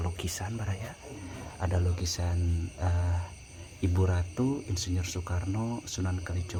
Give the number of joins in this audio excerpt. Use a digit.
0